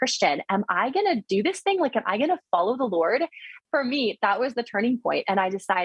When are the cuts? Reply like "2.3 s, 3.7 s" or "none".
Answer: 3.5 s